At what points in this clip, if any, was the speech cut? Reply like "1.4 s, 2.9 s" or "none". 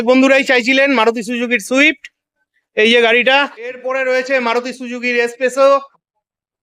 3.8 s